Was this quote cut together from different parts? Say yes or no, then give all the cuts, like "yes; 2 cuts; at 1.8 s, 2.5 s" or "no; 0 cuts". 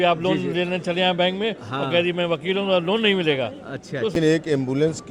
yes; 1 cut; at 4.1 s